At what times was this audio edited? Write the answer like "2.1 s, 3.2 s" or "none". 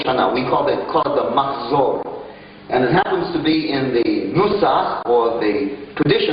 2.8 s